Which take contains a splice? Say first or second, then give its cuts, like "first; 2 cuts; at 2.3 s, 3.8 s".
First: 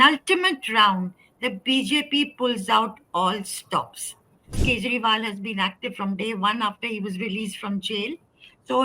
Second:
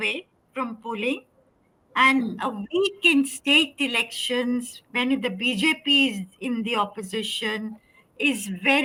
first; 1 cut; at 4.6 s